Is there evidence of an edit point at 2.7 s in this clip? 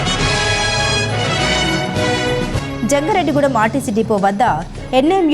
yes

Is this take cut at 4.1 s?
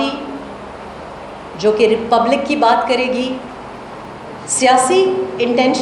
yes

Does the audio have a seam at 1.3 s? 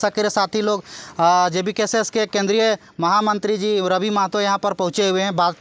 no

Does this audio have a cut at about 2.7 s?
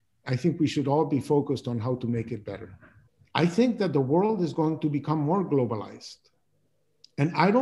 yes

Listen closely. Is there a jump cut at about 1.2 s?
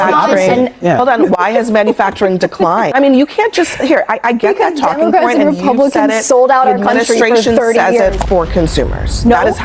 no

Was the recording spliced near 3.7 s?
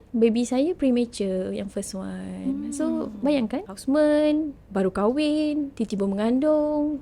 yes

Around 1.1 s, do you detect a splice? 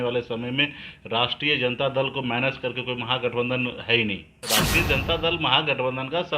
no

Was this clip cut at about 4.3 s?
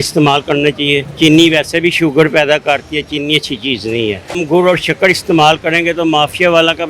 yes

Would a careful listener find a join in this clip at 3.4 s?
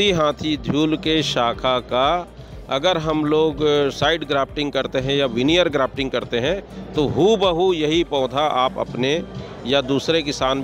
no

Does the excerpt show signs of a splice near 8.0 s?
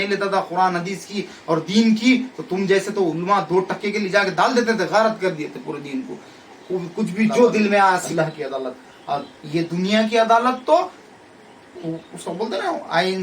yes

